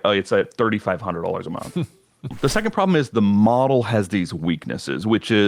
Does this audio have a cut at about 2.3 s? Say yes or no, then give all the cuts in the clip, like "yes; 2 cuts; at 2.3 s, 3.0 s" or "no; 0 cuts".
yes; 1 cut; at 2.3 s